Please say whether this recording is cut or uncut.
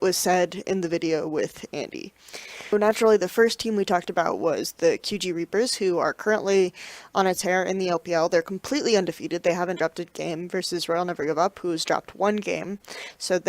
cut